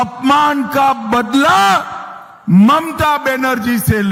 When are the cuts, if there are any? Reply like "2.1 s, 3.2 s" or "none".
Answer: none